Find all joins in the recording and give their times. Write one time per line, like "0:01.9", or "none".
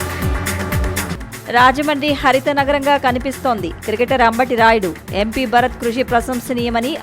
0:00.9